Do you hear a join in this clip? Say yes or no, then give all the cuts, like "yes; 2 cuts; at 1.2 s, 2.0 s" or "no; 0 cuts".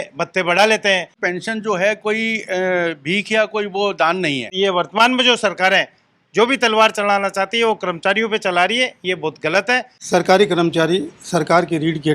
yes; 3 cuts; at 1.2 s, 4.5 s, 9.9 s